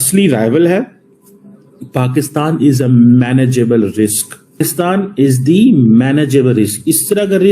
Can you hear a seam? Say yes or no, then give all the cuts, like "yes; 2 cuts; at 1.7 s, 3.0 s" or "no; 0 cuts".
yes; 1 cut; at 4.6 s